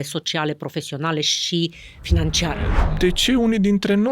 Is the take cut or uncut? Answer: cut